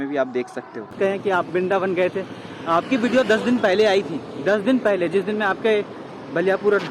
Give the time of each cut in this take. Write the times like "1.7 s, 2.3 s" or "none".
0.9 s